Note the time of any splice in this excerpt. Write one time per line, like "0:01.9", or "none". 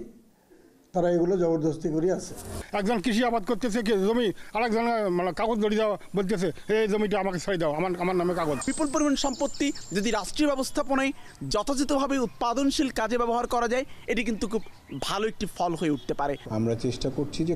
0:02.6
0:08.6
0:16.4